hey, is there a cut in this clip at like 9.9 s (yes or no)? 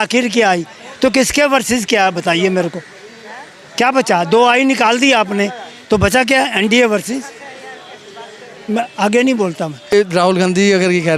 yes